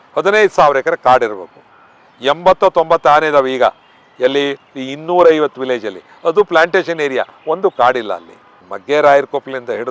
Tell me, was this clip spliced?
no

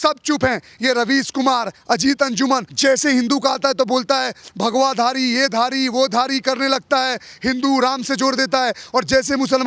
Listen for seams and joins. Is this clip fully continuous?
yes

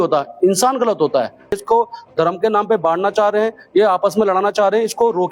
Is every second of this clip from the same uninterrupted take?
no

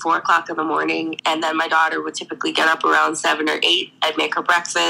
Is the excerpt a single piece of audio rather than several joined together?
no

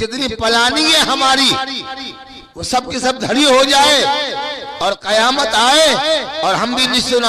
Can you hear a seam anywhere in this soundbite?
no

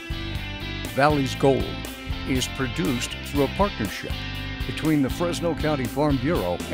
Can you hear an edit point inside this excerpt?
yes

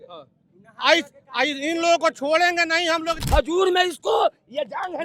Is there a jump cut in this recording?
yes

